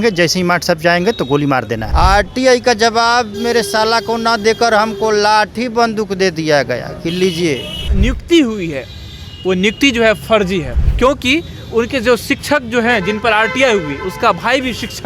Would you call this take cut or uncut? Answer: cut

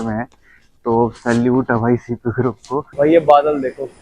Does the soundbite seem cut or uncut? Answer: cut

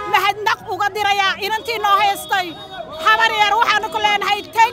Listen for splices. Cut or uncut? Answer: uncut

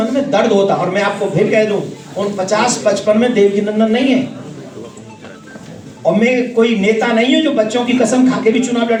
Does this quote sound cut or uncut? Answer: uncut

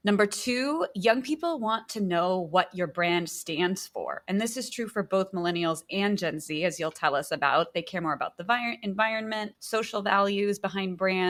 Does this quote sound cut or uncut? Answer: uncut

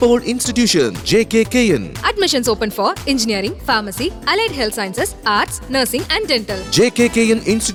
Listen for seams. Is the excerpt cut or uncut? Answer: uncut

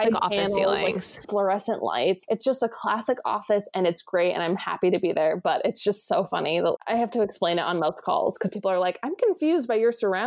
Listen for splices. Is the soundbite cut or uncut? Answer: cut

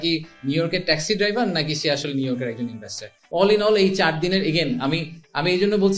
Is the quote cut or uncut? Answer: cut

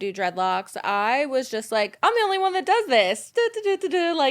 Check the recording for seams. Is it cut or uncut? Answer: cut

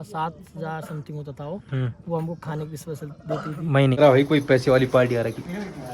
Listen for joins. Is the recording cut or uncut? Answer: cut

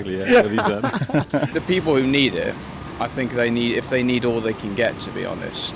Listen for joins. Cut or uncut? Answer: uncut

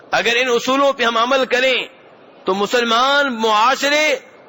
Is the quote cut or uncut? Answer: uncut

